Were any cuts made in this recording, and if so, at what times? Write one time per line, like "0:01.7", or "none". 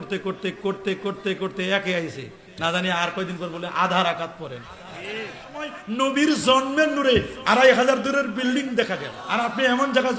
0:06.0
0:09.2